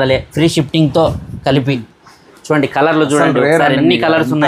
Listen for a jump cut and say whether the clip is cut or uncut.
uncut